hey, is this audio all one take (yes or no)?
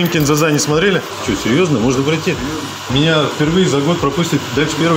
no